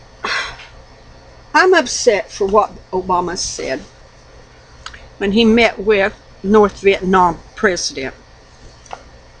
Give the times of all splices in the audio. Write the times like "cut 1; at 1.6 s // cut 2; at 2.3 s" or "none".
cut 1; at 7.5 s